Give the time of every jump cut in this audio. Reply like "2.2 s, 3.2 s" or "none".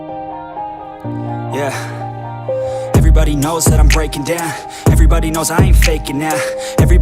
none